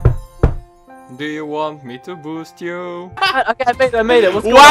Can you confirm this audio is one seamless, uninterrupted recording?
no; 1 cut; at 3.2 s

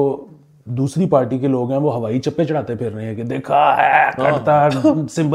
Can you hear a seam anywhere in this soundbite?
no; 0 cuts

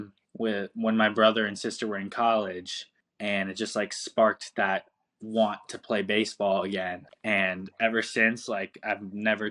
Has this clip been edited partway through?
no; 0 cuts

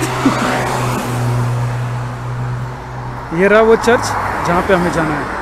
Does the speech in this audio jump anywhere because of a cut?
no; 0 cuts

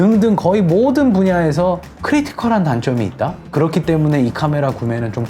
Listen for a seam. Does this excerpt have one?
yes; 2 cuts; at 1.9 s, 3.4 s

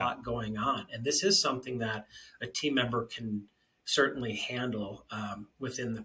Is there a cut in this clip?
no; 0 cuts

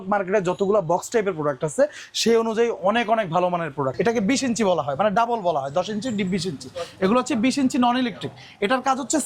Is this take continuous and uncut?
no; 1 cut; at 3.9 s

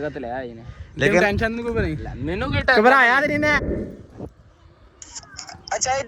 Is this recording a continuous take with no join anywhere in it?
no; 1 cut; at 3.6 s

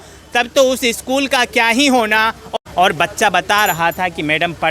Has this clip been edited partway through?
yes; 1 cut; at 2.4 s

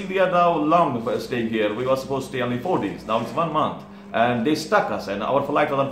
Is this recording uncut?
yes; 0 cuts

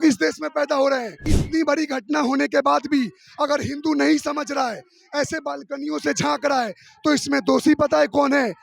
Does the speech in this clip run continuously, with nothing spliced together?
no; 1 cut; at 1.4 s

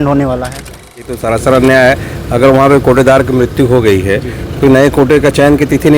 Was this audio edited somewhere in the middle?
yes; 1 cut; at 1.0 s

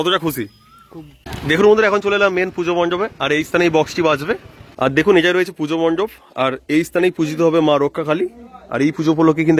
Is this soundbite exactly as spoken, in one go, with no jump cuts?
no; 2 cuts; at 1.3 s, 4.6 s

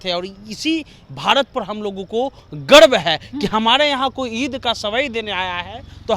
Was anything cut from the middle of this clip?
no; 0 cuts

